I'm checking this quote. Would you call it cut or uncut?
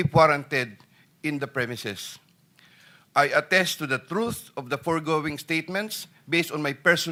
uncut